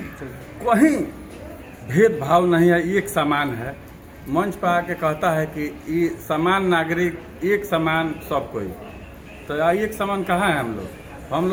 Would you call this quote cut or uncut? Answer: uncut